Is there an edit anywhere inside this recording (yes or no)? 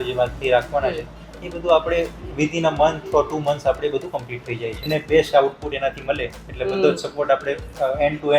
yes